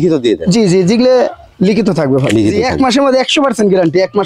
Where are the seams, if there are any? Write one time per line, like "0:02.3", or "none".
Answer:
0:02.6